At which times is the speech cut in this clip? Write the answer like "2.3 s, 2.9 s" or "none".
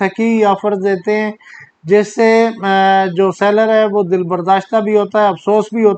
none